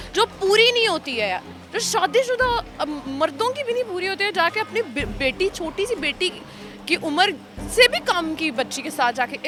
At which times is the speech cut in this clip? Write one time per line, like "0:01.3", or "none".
none

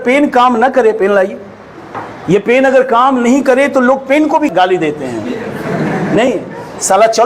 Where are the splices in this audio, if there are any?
0:04.5

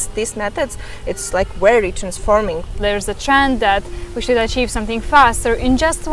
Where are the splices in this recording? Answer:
0:02.7

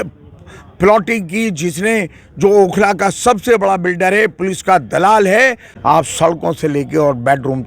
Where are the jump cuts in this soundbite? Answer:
0:05.7

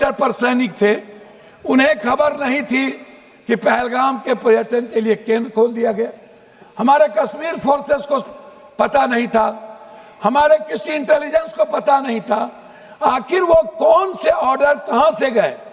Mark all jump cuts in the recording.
none

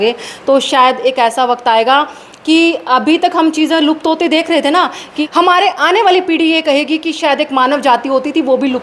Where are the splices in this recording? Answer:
0:05.1

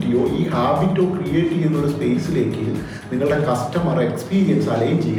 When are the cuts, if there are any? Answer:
none

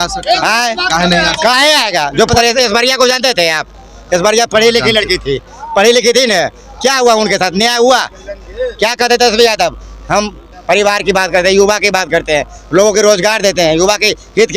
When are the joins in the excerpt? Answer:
0:02.3

